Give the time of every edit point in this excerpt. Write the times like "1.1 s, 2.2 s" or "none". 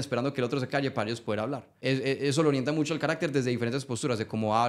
1.7 s